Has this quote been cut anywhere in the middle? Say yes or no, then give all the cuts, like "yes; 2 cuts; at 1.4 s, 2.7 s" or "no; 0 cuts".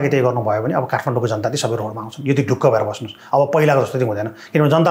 no; 0 cuts